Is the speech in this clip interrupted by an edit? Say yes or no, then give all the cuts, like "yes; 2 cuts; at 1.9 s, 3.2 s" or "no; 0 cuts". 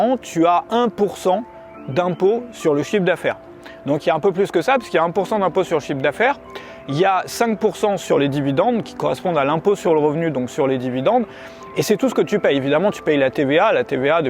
no; 0 cuts